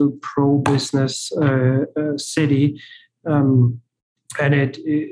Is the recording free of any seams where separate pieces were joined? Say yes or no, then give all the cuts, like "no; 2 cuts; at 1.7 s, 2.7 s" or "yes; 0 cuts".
yes; 0 cuts